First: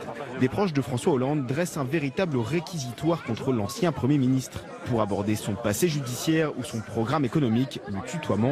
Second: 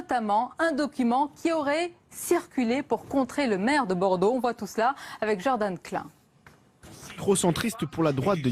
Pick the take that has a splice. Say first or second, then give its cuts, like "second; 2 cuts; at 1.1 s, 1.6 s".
second; 1 cut; at 7.4 s